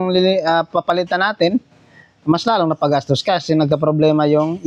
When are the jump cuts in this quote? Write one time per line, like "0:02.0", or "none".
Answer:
none